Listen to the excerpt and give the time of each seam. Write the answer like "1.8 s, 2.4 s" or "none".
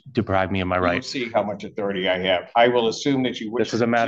none

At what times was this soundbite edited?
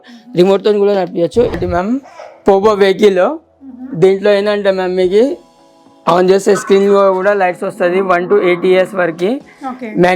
1.5 s

